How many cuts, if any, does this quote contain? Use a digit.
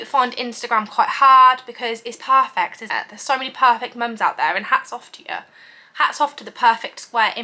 0